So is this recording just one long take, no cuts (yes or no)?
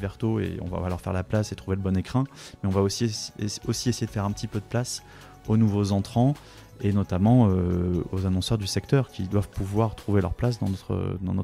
no